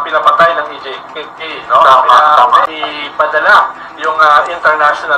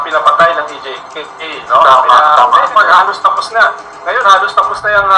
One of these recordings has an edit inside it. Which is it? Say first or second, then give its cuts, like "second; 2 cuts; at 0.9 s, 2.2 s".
first; 1 cut; at 2.7 s